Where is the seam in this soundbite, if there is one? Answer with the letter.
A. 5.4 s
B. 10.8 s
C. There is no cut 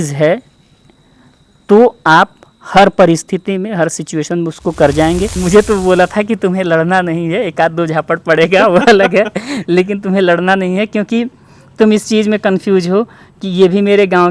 A